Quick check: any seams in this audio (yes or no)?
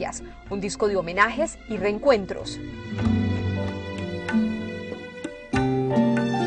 yes